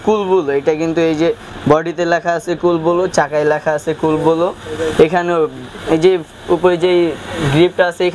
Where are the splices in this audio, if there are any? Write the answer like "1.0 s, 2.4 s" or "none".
none